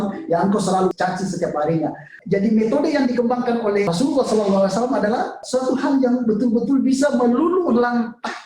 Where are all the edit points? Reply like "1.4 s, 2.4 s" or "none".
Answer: 0.9 s, 2.1 s, 3.9 s, 5.4 s